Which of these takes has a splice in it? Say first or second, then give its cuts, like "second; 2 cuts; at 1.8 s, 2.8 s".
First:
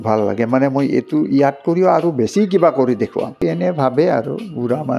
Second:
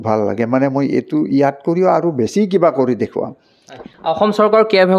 first; 1 cut; at 3.4 s